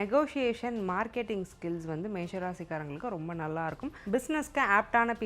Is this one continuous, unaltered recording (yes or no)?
no